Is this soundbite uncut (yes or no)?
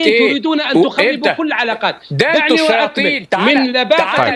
yes